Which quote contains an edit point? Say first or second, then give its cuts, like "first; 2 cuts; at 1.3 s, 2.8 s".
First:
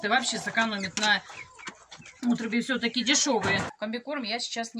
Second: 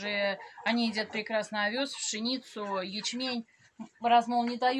first; 1 cut; at 3.7 s